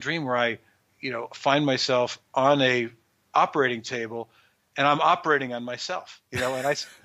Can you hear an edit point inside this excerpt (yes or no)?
yes